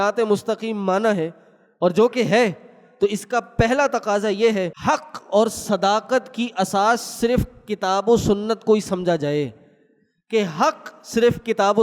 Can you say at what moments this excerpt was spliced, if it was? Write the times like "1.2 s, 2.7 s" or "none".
4.7 s